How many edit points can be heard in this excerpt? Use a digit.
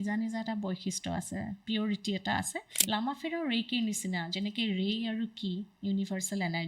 1